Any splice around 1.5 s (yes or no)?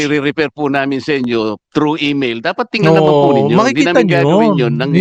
no